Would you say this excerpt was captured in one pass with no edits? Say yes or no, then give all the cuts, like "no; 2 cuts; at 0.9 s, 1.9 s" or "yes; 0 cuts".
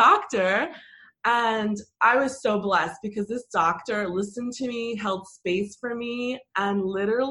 yes; 0 cuts